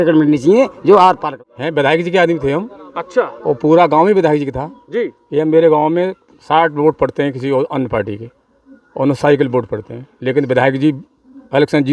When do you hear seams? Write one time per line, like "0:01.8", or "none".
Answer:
0:01.3